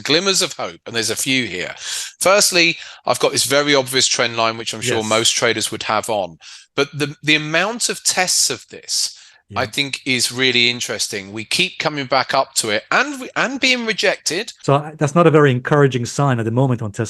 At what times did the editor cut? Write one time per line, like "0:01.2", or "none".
0:14.5